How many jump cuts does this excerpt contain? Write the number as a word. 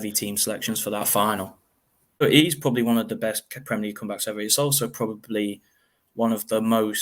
one